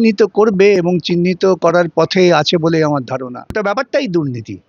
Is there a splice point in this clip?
yes; 1 cut; at 3.5 s

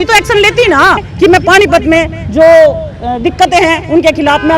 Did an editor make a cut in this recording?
yes; 1 cut; at 1.1 s

